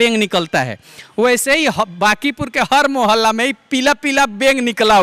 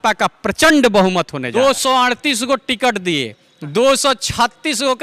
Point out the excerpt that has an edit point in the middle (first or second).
second